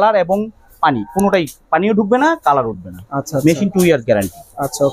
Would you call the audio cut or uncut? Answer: uncut